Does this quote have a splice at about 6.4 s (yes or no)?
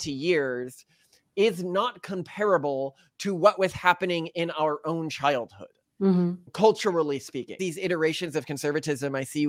no